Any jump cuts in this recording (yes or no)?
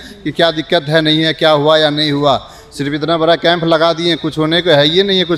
no